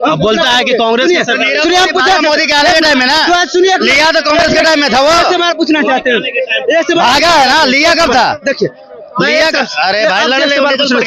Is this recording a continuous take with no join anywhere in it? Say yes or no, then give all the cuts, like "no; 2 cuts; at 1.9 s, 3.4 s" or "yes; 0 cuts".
yes; 0 cuts